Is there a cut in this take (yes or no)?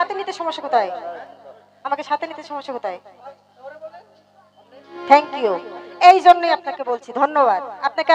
no